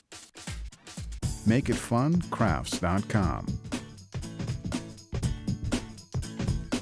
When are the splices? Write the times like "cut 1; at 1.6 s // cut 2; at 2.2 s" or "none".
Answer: cut 1; at 3.4 s